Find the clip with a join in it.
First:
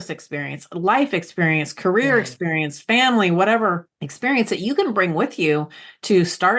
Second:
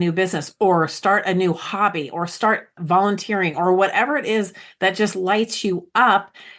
second; 1 cut; at 2.7 s

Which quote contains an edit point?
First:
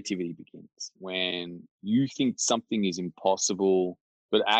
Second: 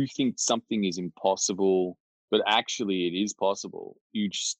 first; 1 cut; at 1.0 s

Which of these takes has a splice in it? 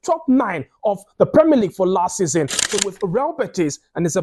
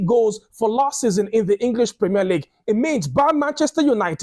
first; 1 cut; at 2.8 s

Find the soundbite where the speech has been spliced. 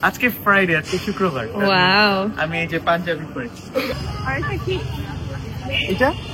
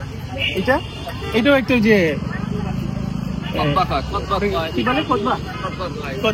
first; 1 cut; at 3.9 s

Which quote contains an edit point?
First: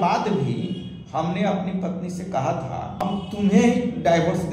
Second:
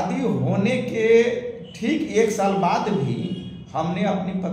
first; 1 cut; at 3.0 s

